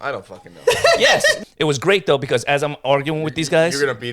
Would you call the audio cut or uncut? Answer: cut